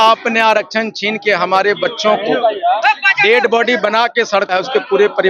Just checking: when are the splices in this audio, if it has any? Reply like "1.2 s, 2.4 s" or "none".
none